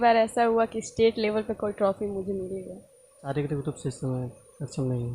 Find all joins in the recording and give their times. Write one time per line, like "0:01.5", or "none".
0:03.3